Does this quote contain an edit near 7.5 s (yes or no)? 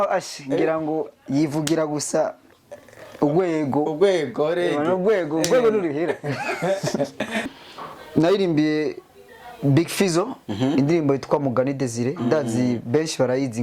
yes